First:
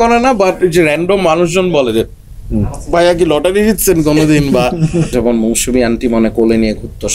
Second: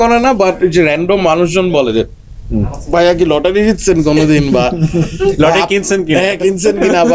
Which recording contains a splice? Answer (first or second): first